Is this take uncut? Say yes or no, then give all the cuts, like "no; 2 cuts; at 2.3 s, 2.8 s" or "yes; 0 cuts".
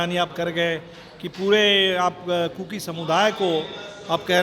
yes; 0 cuts